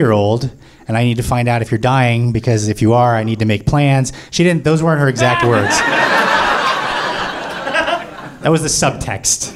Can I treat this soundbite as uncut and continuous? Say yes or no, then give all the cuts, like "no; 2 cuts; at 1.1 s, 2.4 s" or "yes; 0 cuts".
yes; 0 cuts